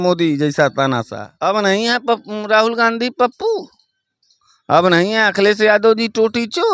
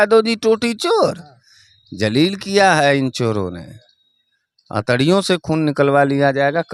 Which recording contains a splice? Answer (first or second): first